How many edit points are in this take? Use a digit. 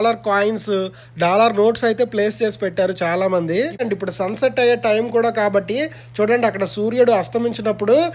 1